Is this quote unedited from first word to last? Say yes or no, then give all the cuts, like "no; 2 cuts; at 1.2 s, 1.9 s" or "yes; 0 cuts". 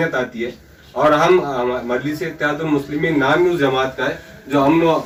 yes; 0 cuts